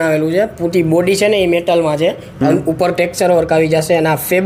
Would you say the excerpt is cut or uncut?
uncut